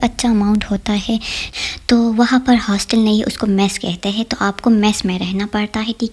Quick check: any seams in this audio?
yes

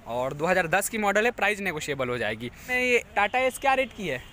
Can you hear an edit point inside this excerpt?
yes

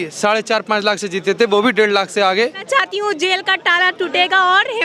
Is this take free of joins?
no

